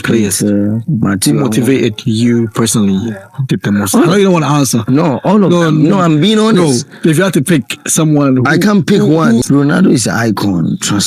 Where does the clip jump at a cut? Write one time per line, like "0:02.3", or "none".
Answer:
0:09.4